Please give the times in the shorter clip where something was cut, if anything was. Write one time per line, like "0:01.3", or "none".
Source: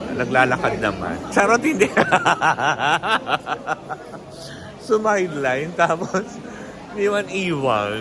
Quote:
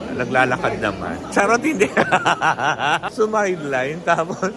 0:03.0